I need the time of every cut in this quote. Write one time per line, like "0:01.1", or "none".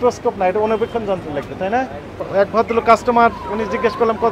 0:02.3